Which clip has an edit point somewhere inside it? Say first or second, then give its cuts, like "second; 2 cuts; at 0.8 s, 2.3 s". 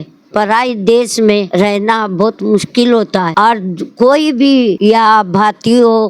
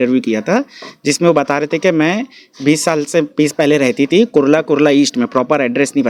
first; 3 cuts; at 1.5 s, 3.3 s, 4.8 s